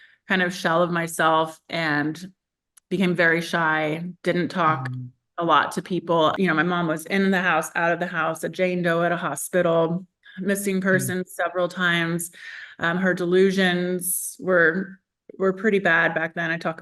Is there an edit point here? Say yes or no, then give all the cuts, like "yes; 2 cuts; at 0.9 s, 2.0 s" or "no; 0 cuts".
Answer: no; 0 cuts